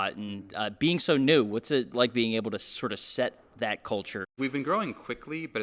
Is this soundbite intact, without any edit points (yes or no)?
no